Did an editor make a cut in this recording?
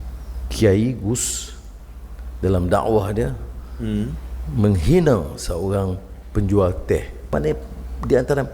yes; 1 cut; at 7.3 s

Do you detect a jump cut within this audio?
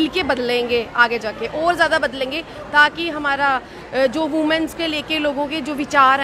no; 0 cuts

